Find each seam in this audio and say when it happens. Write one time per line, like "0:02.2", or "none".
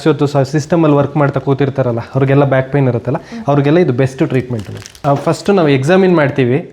0:05.0